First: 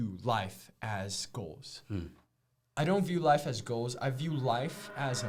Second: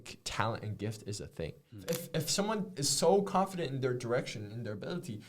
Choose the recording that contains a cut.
second; 1 cut; at 1.8 s

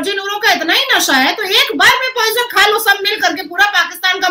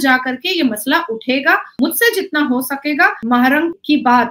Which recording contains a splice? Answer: second; 2 cuts; at 1.7 s, 3.4 s

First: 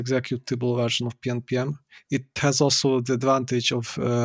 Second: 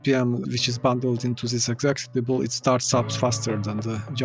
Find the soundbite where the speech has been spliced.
first; 1 cut; at 2.3 s

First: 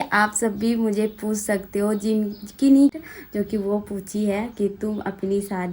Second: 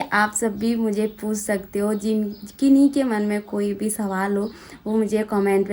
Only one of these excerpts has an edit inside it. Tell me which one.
first; 1 cut; at 2.9 s

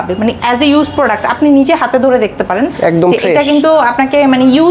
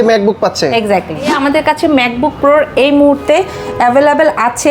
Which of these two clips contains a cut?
second; 1 cut; at 1.3 s

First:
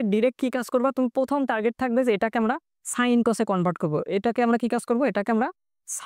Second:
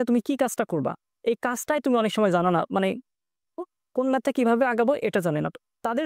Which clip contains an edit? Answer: second; 1 cut; at 3.6 s

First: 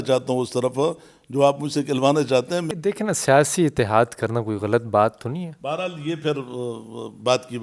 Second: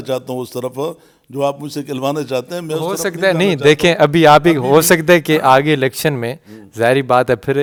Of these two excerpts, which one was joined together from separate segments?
first; 1 cut; at 2.7 s

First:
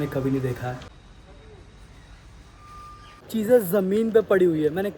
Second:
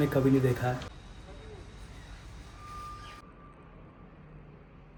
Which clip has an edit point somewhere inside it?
first; 1 cut; at 3.2 s

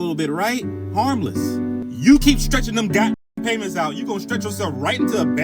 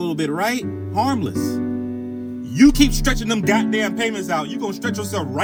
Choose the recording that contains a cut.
first; 1 cut; at 1.9 s

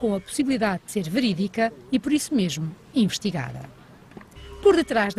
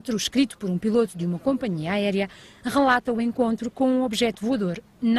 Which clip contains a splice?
first; 1 cut; at 3.0 s

